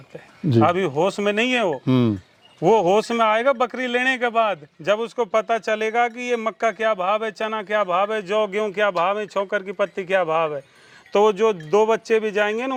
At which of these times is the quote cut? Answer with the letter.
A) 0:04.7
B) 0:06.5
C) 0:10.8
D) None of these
D